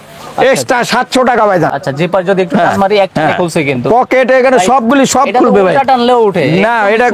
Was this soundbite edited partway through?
yes; 1 cut; at 1.8 s

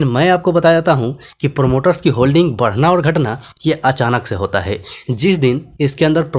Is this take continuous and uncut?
yes; 0 cuts

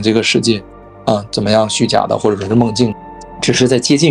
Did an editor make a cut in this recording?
yes; 2 cuts; at 0.9 s, 3.0 s

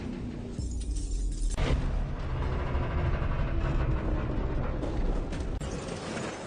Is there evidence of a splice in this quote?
no; 0 cuts

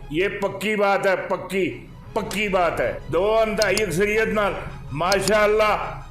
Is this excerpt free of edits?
no; 1 cut; at 3.0 s

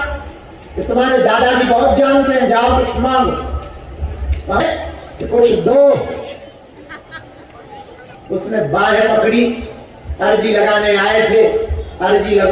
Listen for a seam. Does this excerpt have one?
yes; 2 cuts; at 4.6 s, 8.1 s

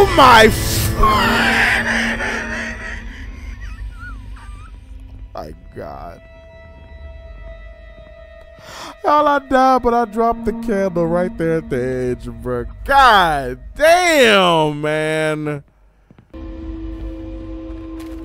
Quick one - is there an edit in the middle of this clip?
yes; 1 cut; at 16.3 s

